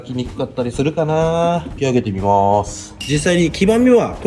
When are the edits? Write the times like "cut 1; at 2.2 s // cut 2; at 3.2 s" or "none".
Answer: cut 1; at 1.7 s // cut 2; at 2.9 s